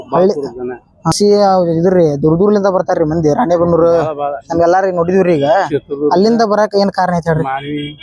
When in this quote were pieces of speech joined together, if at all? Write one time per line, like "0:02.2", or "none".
0:01.1